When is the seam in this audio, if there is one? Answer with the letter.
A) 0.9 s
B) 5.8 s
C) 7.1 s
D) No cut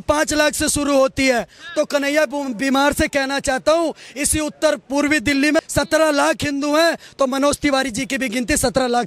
D